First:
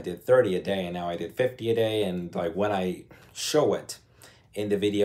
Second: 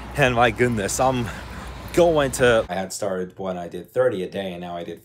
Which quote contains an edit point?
second; 1 cut; at 2.7 s

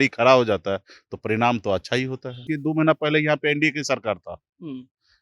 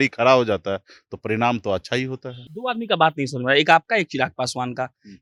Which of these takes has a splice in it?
first; 1 cut; at 2.5 s

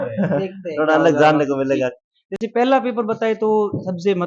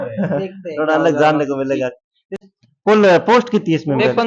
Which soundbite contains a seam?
second; 1 cut; at 2.3 s

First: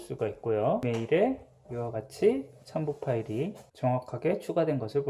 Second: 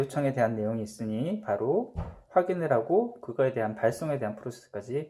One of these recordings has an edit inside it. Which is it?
first; 2 cuts; at 0.8 s, 4.0 s

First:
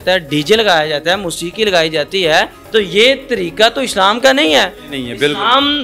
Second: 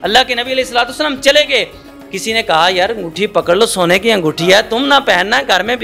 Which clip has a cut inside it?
first; 1 cut; at 2.6 s

